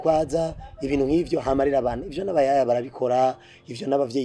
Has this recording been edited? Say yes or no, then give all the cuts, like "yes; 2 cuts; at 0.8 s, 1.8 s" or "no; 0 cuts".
no; 0 cuts